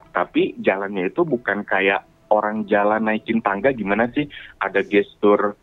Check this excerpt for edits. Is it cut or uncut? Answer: uncut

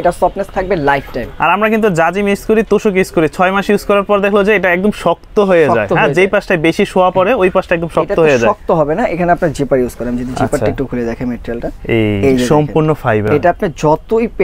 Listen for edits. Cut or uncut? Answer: uncut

